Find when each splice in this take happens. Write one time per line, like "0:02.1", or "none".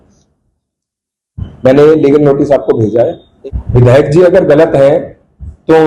0:03.3